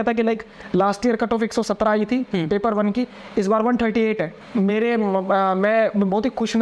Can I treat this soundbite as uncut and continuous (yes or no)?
no